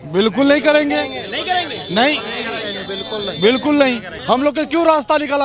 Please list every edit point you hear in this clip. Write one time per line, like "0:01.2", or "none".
0:04.1